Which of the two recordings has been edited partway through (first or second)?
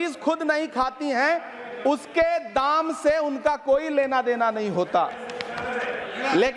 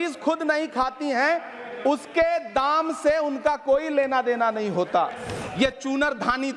second